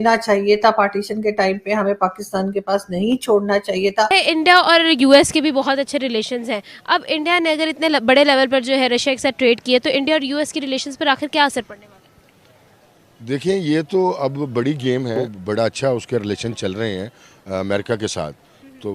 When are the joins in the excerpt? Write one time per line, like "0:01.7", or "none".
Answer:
0:04.1
0:15.2